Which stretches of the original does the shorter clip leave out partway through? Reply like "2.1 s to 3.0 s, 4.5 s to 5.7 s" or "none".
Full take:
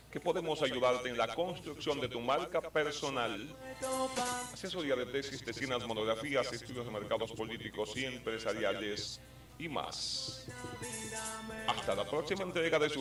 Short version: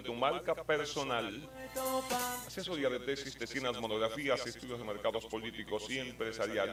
none